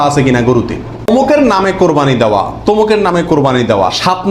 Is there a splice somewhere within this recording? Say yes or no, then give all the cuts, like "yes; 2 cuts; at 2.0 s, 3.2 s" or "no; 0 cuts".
yes; 1 cut; at 1.1 s